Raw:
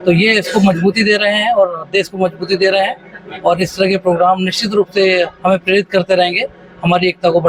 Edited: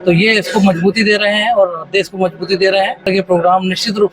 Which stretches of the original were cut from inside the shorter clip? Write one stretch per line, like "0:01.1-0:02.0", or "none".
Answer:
0:03.1-0:03.8